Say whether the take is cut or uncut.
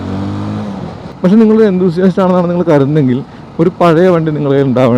cut